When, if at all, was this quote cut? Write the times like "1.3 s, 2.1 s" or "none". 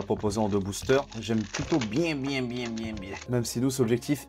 3.2 s